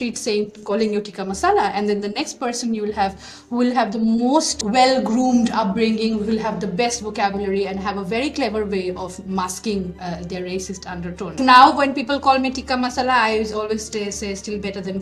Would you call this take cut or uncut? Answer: cut